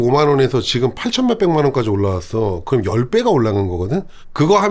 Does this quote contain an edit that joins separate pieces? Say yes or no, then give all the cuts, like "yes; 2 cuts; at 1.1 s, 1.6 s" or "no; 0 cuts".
no; 0 cuts